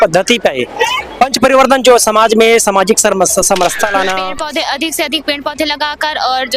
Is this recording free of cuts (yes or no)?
no